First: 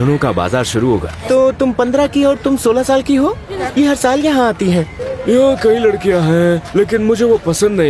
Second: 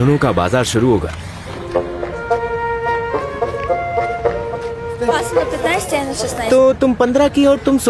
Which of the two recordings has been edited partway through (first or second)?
first